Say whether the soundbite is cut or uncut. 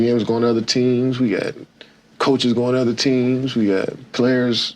cut